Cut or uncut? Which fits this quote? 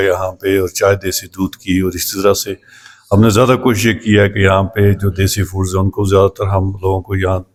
uncut